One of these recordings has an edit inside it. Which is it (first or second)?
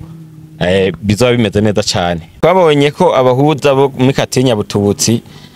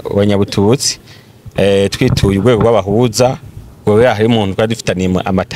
first